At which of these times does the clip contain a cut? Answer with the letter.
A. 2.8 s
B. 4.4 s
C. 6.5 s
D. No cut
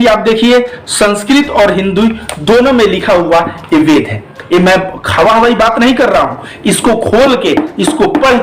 B